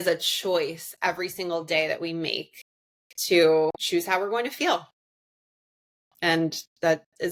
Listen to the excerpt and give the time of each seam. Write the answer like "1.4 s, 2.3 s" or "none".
none